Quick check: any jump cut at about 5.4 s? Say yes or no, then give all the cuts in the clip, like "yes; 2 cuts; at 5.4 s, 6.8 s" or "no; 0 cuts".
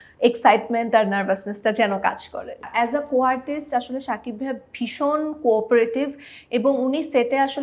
no; 1 cut; at 2.6 s